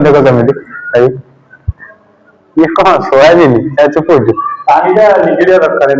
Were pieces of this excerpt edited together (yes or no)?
no